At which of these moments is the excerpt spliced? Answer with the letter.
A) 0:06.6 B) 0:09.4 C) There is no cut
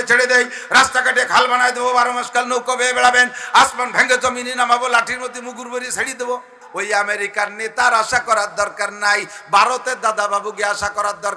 A